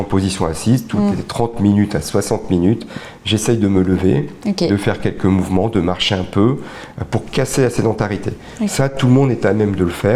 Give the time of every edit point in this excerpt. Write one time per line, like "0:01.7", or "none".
none